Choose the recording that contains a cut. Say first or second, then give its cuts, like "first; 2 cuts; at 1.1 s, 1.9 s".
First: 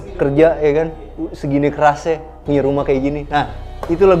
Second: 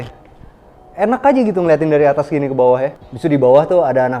second; 1 cut; at 3.0 s